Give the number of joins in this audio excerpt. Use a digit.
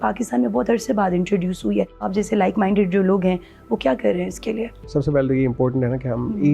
2